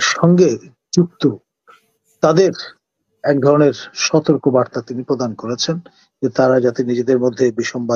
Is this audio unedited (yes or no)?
yes